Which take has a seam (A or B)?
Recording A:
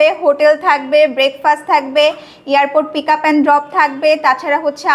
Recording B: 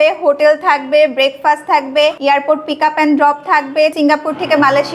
B